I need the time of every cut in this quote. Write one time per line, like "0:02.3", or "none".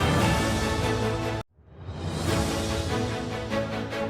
0:01.0